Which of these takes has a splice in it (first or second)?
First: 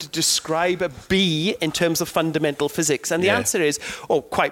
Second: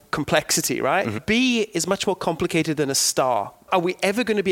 second